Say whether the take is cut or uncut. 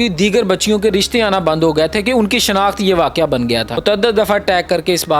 cut